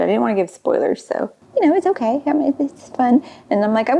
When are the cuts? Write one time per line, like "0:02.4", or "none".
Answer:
0:01.4